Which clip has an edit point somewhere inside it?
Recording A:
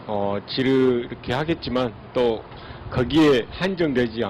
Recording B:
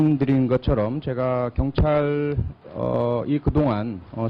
B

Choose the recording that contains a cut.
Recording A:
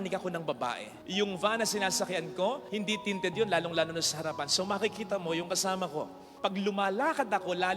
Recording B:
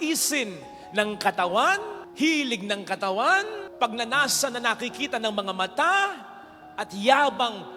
A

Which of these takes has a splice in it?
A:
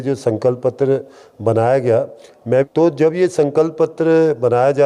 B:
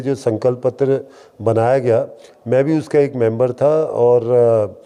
A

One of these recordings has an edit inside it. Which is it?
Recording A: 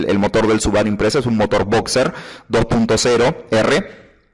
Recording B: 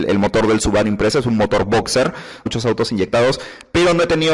A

